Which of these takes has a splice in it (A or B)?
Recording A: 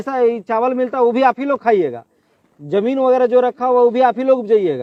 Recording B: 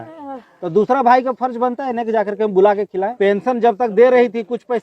B